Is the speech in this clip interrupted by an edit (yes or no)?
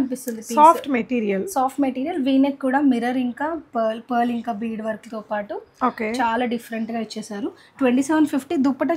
no